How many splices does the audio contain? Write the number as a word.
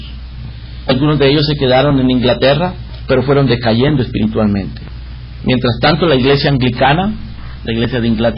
one